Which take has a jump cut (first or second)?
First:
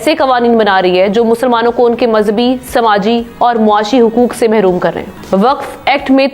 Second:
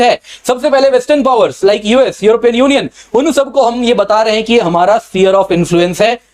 first